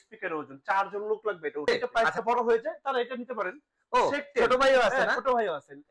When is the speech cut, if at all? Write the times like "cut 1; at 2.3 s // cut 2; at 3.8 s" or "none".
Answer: cut 1; at 1.7 s

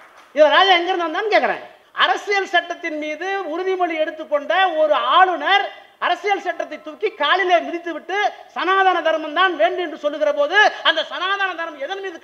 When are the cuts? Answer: cut 1; at 1.8 s

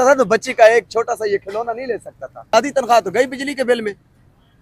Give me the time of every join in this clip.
cut 1; at 2.5 s

